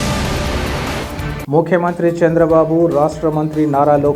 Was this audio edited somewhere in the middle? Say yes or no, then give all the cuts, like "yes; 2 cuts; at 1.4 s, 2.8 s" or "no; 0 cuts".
yes; 1 cut; at 1.0 s